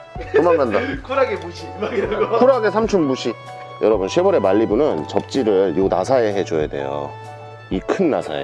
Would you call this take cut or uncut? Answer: cut